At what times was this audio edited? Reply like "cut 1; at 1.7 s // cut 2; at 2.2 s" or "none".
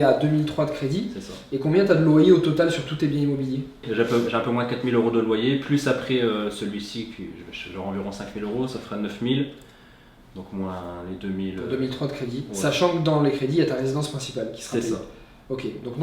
cut 1; at 3.8 s

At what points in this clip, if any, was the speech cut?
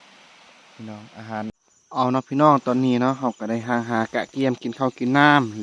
cut 1; at 1.5 s

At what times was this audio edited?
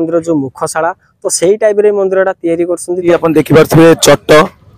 cut 1; at 3.0 s

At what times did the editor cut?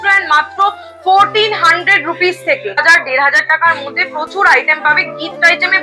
cut 1; at 2.8 s

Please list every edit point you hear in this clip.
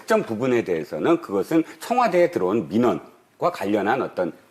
cut 1; at 1.1 s

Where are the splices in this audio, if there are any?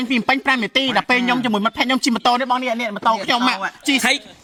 none

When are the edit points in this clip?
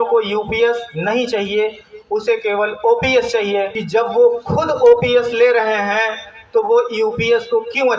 cut 1; at 3.8 s

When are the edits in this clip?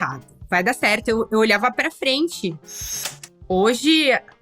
cut 1; at 2.9 s

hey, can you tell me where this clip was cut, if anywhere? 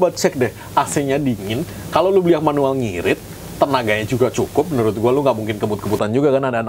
none

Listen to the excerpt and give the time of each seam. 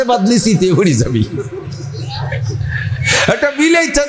none

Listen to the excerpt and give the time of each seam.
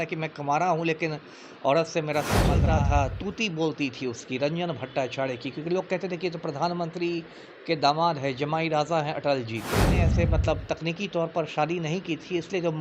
cut 1; at 2.6 s // cut 2; at 10.0 s

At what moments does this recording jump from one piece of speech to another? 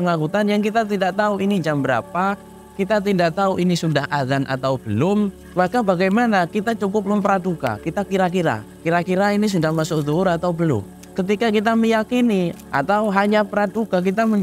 cut 1; at 5.4 s // cut 2; at 10.9 s // cut 3; at 12.6 s

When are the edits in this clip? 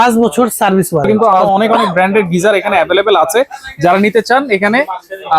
cut 1; at 1.3 s

